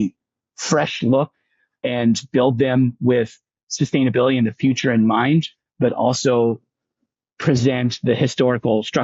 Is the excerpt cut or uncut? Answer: cut